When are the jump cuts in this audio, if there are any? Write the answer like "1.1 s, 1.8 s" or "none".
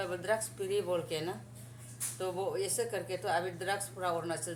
none